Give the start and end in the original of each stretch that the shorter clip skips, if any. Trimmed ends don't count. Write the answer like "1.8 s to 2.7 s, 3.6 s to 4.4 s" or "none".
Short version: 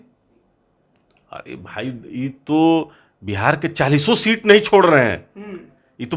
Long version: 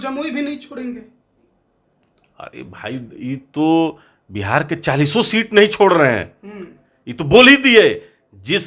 none